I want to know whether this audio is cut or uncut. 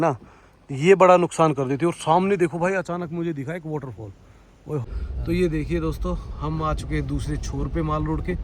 cut